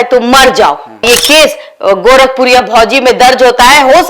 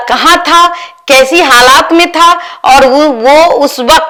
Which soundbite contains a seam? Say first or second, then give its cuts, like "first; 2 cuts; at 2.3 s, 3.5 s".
first; 1 cut; at 1.0 s